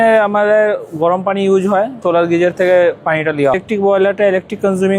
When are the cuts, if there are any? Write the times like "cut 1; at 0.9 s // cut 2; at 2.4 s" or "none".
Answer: cut 1; at 2.0 s // cut 2; at 3.6 s